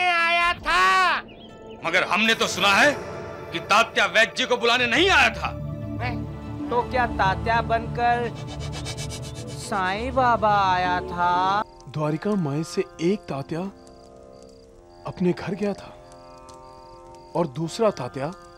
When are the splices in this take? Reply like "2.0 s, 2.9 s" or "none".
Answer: 11.6 s